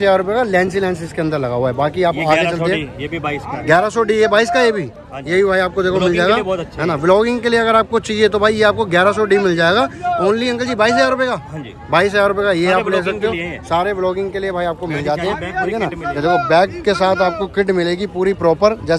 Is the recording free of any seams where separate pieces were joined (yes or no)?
yes